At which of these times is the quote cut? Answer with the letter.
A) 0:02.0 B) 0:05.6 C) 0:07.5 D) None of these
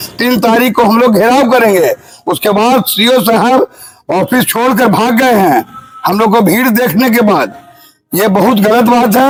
D